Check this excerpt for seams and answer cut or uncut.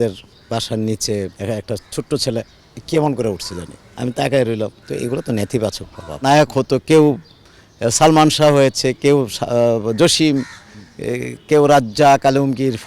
cut